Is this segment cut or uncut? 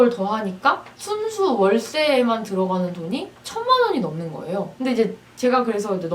uncut